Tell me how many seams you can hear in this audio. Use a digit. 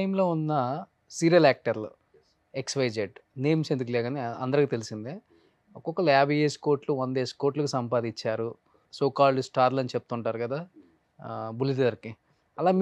1